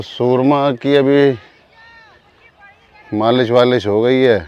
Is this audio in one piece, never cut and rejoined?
yes; 0 cuts

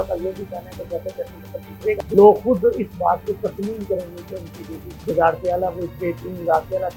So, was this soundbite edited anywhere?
yes; 2 cuts; at 2.0 s, 5.1 s

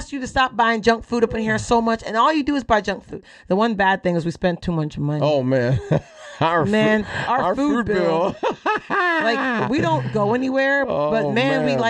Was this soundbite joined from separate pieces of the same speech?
yes; 1 cut; at 3.3 s

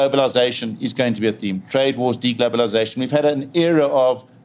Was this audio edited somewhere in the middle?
no; 0 cuts

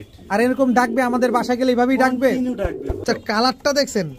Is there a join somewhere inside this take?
yes; 1 cut; at 3.0 s

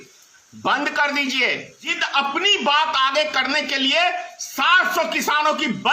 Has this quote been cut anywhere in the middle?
yes; 1 cut; at 2.0 s

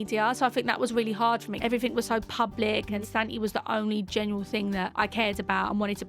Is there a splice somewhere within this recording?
yes; 3 cuts; at 1.5 s, 3.0 s, 4.9 s

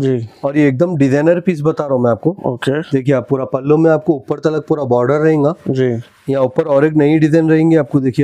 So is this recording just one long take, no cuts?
yes; 0 cuts

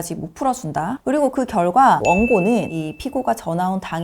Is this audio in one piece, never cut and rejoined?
no; 2 cuts; at 1.0 s, 2.0 s

